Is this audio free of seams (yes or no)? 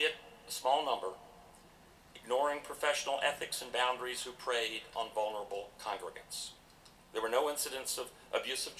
no